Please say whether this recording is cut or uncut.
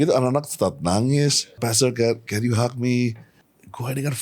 cut